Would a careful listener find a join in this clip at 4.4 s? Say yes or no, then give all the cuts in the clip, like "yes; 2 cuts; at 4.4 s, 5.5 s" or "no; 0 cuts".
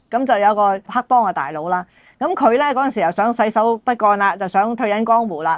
no; 1 cut; at 0.9 s